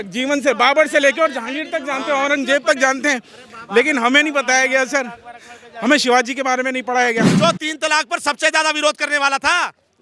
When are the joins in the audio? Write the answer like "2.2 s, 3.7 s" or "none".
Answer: 7.3 s